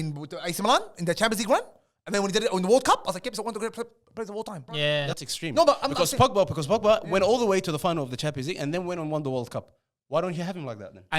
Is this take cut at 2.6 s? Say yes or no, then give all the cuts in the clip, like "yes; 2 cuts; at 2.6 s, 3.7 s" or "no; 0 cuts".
no; 1 cut; at 4.9 s